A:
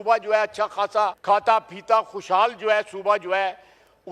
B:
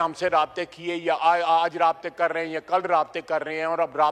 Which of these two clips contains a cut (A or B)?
A